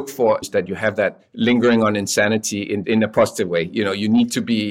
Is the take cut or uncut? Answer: cut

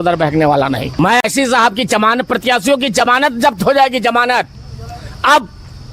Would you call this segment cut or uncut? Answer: cut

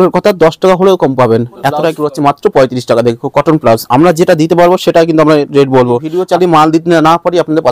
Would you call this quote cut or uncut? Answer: cut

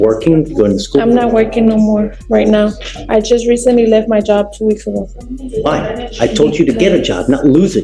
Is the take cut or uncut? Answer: uncut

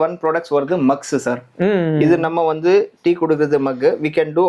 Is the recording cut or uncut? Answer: uncut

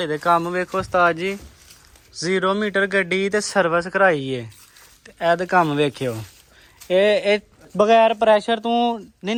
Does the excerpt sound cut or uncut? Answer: uncut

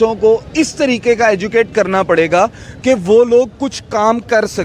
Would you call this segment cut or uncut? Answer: uncut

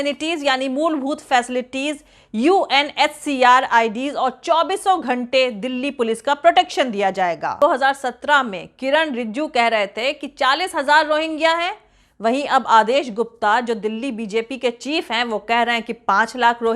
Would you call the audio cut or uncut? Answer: cut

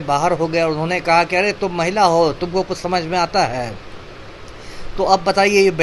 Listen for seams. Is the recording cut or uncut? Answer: uncut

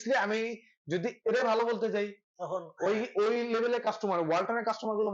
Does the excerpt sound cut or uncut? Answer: uncut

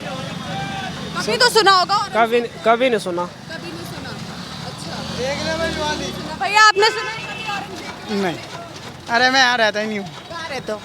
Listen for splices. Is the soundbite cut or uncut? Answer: uncut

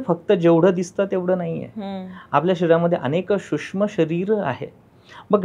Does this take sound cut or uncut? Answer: uncut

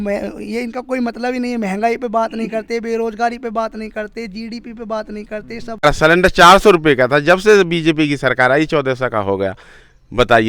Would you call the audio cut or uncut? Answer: cut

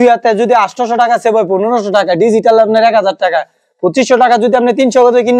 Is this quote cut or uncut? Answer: uncut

